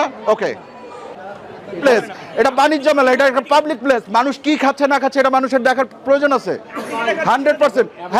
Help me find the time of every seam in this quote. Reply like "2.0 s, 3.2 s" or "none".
none